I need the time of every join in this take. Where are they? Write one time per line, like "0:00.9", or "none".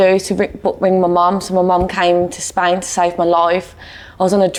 none